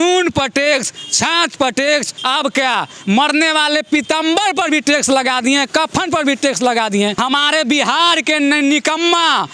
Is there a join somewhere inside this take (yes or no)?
yes